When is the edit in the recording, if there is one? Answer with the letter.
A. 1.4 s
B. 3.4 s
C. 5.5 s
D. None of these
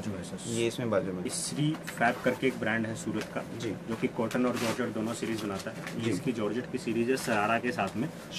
A